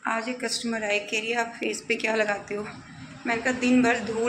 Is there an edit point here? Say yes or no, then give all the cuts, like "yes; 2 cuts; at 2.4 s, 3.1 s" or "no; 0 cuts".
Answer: no; 0 cuts